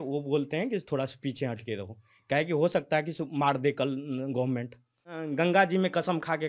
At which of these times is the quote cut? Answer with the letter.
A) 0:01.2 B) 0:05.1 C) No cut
B